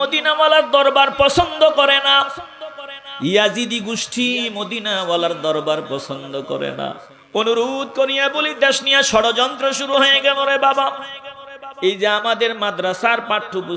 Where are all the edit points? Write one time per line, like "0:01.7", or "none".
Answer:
0:07.1